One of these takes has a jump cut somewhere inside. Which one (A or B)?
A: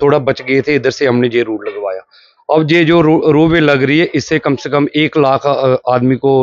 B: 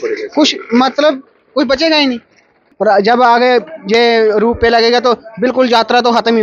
B